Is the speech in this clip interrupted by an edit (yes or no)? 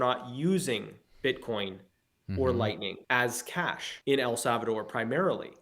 yes